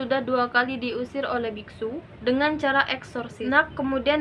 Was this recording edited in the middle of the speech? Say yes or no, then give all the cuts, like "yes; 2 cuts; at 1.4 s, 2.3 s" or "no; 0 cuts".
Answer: yes; 2 cuts; at 2.1 s, 3.3 s